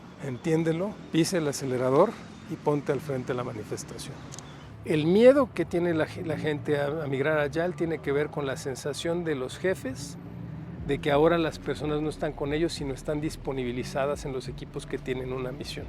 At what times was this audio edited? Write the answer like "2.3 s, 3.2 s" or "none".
1.0 s, 4.6 s